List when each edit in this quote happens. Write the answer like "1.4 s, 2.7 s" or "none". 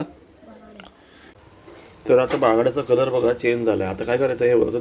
1.4 s